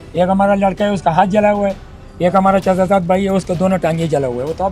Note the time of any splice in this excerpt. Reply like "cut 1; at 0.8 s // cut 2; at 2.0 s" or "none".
none